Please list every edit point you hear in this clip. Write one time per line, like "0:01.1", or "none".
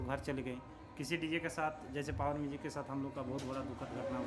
none